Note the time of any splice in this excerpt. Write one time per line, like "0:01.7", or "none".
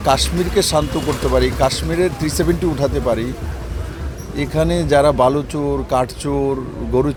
none